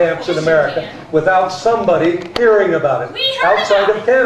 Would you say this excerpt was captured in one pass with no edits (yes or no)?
yes